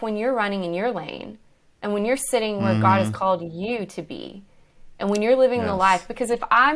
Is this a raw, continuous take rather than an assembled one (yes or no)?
yes